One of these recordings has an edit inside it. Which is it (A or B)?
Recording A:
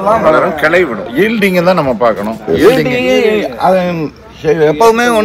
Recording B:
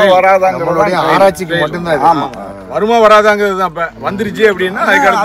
A